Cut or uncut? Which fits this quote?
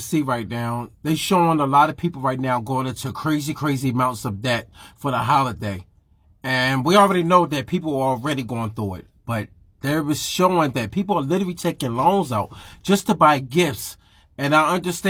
uncut